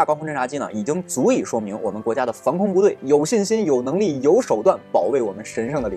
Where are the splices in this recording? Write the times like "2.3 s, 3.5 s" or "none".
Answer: none